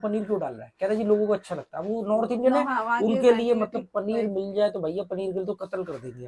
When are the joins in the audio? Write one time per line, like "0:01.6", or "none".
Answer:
none

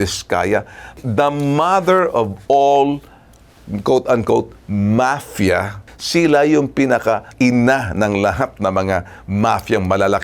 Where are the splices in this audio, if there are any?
0:05.8
0:07.3

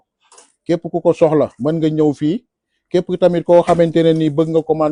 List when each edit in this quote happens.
none

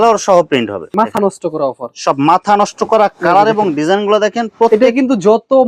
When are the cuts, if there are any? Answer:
0:00.9

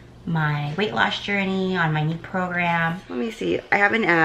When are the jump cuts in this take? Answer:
0:03.0

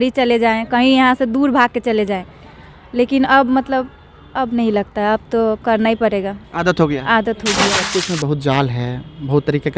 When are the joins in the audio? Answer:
0:07.8

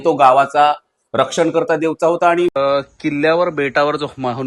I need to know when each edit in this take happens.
0:02.5

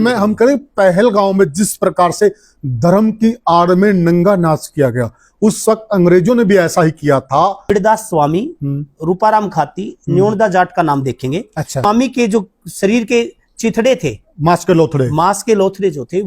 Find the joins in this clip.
0:07.7
0:11.8

